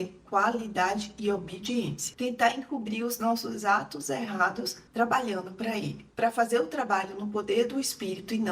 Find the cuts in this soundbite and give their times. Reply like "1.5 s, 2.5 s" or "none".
2.1 s, 6.0 s